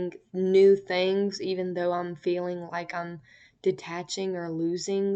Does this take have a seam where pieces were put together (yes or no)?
no